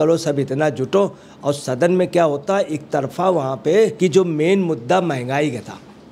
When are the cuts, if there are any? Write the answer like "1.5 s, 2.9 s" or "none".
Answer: 3.9 s